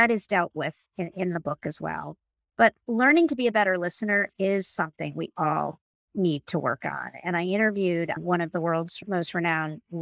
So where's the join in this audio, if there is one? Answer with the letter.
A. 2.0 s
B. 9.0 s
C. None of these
B